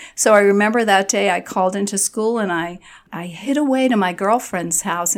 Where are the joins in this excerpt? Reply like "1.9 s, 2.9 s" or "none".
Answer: 3.0 s